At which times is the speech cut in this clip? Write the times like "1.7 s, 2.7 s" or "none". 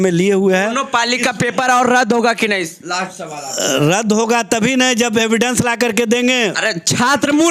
none